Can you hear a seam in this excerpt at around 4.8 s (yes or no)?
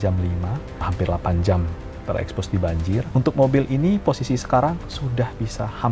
no